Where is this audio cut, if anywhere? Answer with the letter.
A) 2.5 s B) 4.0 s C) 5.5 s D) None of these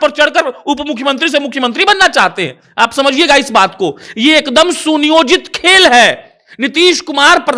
D